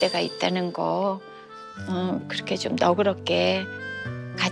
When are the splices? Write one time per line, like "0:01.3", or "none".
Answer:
none